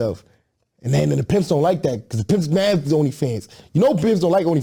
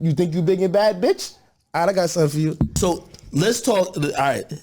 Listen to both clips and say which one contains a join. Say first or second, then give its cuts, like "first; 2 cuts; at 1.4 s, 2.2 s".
second; 1 cut; at 2.7 s